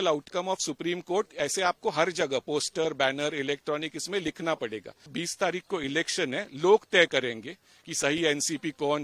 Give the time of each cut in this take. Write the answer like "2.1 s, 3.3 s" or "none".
5.1 s